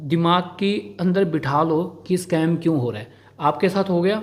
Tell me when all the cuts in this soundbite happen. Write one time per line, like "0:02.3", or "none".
none